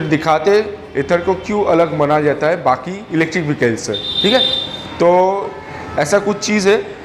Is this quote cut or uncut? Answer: cut